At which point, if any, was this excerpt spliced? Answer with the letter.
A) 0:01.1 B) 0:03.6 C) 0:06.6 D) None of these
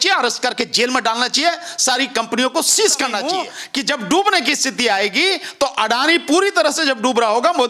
B